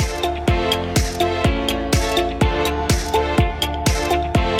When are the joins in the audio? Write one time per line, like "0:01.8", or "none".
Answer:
none